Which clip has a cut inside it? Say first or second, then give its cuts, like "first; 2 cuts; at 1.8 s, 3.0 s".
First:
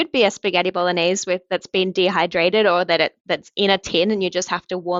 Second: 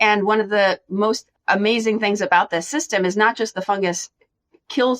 second; 1 cut; at 1.3 s